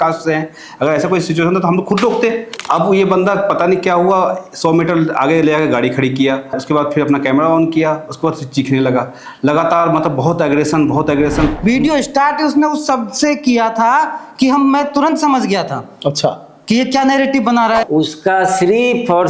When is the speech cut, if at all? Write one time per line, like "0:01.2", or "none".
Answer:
0:02.5
0:06.6
0:11.6
0:17.8